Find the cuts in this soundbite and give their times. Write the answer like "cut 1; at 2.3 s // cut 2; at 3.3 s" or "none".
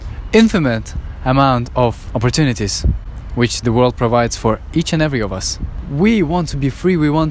cut 1; at 2.0 s // cut 2; at 5.8 s